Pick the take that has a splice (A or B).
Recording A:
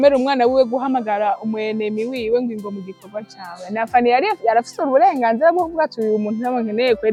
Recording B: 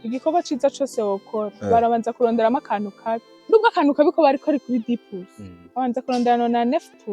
B